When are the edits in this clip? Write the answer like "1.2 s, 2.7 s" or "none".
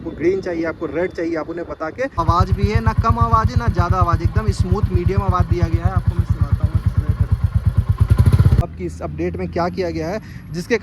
2.2 s, 8.6 s